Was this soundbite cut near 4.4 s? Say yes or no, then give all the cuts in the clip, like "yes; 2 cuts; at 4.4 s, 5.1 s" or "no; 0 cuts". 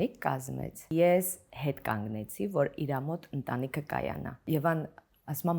yes; 2 cuts; at 0.9 s, 4.4 s